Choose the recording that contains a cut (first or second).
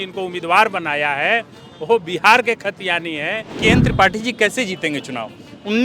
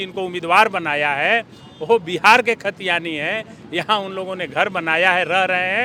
first